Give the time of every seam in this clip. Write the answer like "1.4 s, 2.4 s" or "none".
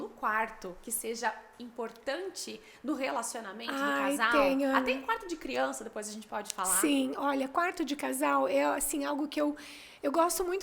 none